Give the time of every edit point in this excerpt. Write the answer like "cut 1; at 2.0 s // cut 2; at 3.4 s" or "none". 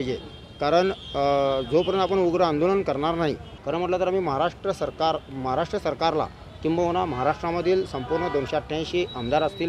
cut 1; at 3.5 s